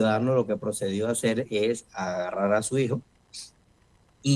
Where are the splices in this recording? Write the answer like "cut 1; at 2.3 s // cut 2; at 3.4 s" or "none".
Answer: none